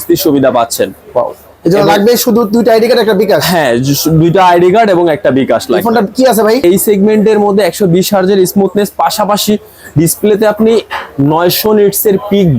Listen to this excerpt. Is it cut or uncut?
cut